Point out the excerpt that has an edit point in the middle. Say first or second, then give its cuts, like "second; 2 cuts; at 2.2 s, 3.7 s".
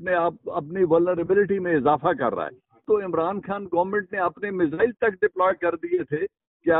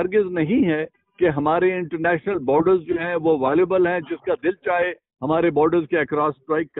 first; 1 cut; at 2.8 s